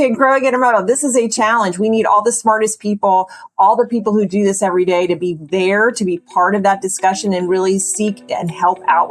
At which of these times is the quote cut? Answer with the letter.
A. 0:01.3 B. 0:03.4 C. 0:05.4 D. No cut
D